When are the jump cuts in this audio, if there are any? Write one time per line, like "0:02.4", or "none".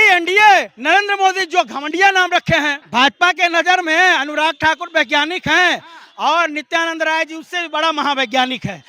0:02.8